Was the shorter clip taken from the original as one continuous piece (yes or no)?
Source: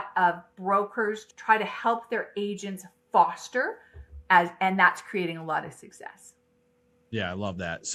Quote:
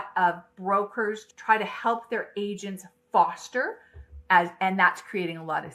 yes